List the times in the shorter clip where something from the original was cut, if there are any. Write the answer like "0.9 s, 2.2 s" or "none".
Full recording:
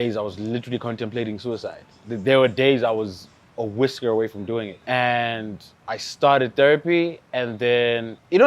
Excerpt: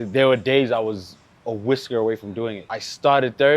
2.6 s